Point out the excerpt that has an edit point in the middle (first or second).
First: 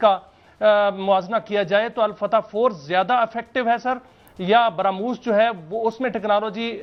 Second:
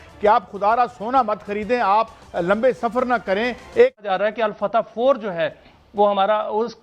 second